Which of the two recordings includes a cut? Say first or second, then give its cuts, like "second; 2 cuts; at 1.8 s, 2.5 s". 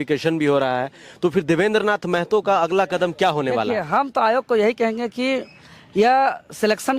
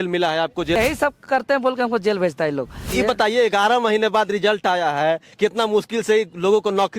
second; 2 cuts; at 0.8 s, 2.9 s